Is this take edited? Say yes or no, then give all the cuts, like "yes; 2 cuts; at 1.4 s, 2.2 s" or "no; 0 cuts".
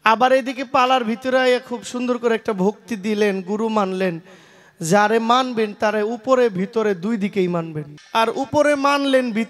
yes; 1 cut; at 7.9 s